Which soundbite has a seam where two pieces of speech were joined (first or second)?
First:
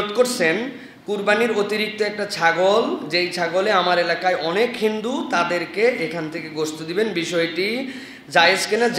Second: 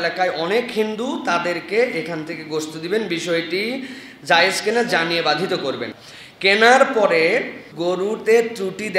second